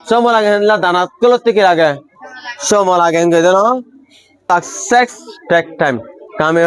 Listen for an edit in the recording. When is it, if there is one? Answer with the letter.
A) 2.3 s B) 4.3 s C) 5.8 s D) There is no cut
B